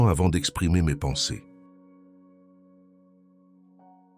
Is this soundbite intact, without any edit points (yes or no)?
no